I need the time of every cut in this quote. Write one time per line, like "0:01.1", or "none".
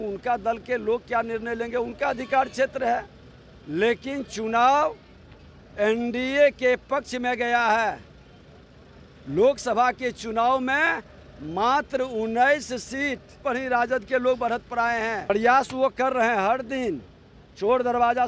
0:13.3
0:15.3